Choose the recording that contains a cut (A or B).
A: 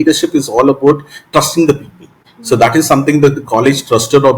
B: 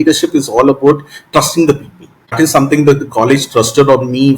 B